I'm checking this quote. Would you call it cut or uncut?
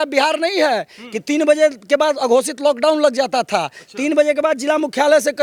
uncut